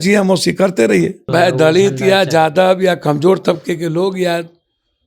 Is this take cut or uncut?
cut